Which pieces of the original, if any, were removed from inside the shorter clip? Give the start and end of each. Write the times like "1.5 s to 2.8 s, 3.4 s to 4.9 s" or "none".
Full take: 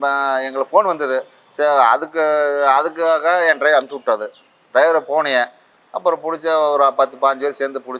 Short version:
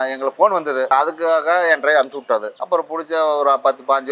1.2 s to 2.7 s, 4.3 s to 5.9 s